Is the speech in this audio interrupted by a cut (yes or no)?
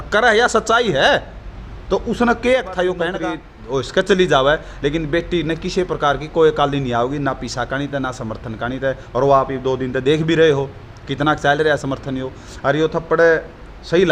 yes